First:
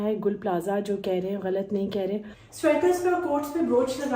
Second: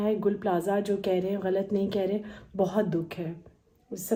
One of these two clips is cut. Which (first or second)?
first